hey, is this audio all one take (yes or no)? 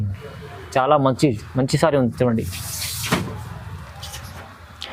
yes